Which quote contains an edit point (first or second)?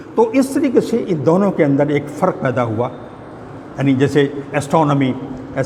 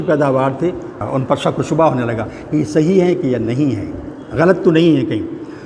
second